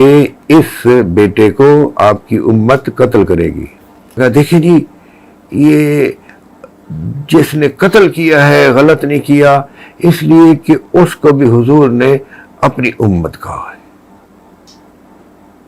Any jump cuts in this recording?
yes; 1 cut; at 4.2 s

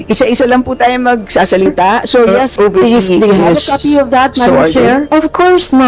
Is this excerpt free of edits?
no; 1 cut; at 2.4 s

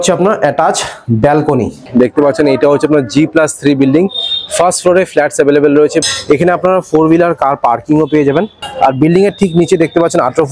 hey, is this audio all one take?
no; 3 cuts; at 1.9 s, 6.0 s, 8.6 s

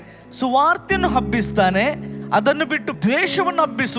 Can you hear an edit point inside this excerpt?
yes; 1 cut; at 2.9 s

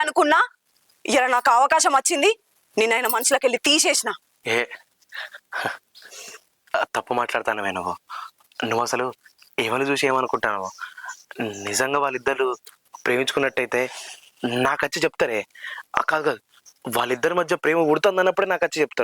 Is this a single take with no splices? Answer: no; 1 cut; at 4.3 s

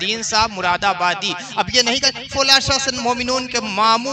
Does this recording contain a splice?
no; 0 cuts

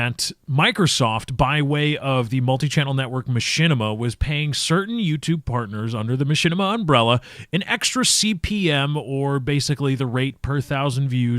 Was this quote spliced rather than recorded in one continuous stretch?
yes; 1 cut; at 1.3 s

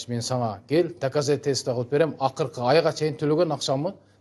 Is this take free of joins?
yes; 0 cuts

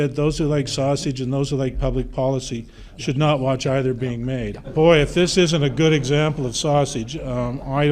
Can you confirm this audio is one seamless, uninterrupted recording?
yes; 0 cuts

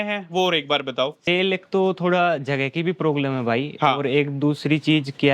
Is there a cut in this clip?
yes; 1 cut; at 1.2 s

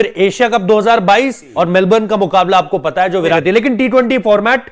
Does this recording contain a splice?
yes; 2 cuts; at 1.5 s, 3.4 s

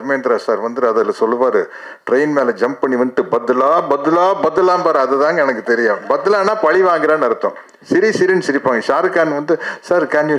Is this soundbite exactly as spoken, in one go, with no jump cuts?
yes; 0 cuts

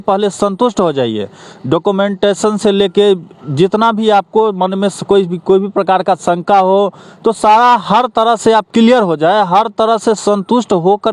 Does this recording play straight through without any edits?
yes; 0 cuts

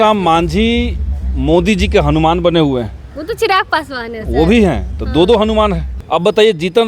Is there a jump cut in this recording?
yes; 1 cut; at 5.9 s

